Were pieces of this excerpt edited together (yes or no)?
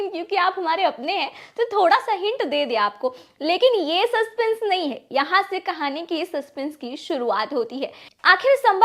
no